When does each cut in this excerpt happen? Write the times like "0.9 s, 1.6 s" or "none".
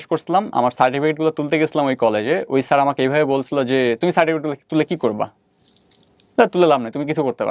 none

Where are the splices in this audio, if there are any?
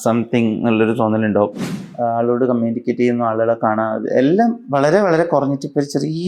1.6 s

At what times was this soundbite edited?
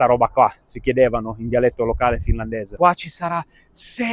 2.7 s

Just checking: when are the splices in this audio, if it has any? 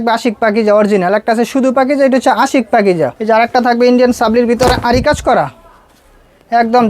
3.2 s

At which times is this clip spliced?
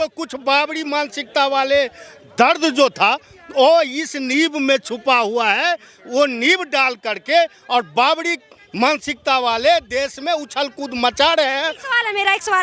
none

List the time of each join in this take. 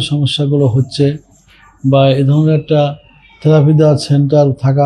none

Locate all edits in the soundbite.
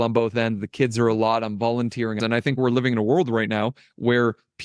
2.2 s

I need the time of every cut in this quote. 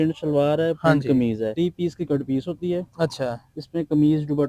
1.5 s

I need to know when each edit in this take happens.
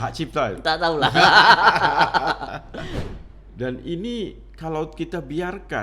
2.9 s

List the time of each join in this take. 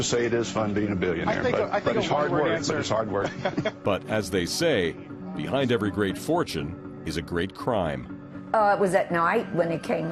5.2 s

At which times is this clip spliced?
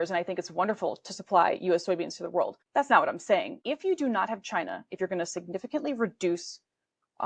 2.6 s, 3.6 s

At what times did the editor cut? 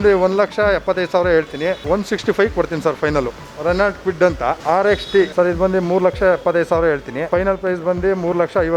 3.4 s, 4.6 s, 5.3 s, 7.2 s

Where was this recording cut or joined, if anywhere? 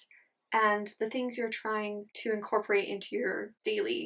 2.1 s

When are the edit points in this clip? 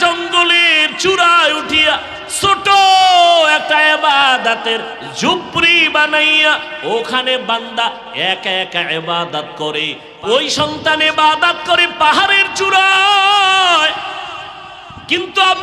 10.0 s

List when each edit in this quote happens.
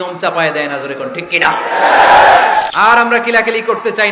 2.7 s

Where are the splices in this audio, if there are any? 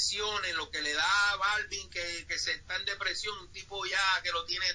none

